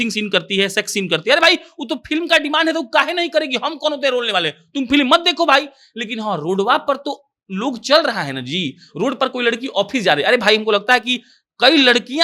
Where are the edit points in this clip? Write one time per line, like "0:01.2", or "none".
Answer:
none